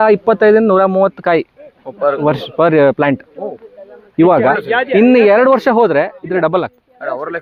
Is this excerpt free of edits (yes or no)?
yes